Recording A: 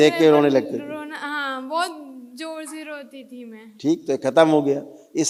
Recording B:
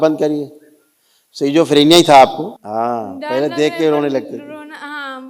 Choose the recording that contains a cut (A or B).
B